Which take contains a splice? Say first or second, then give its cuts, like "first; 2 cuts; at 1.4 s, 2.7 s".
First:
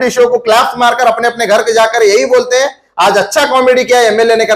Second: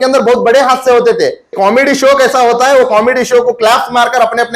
second; 1 cut; at 1.5 s